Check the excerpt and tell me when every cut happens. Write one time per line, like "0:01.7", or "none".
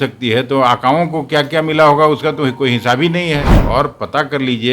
0:03.5